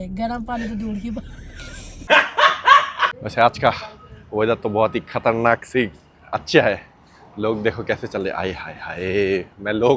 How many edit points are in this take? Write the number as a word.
zero